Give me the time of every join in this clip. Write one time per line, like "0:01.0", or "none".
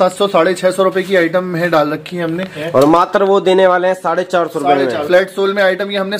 0:02.6
0:05.1